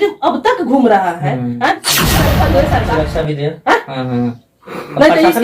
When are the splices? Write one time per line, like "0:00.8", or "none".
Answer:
0:02.1